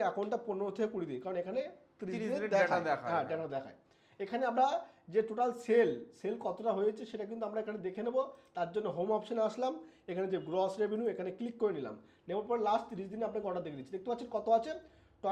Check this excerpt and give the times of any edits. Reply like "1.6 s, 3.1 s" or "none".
none